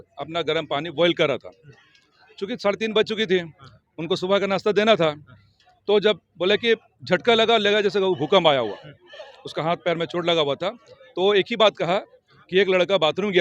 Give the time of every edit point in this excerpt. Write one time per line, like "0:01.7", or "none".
none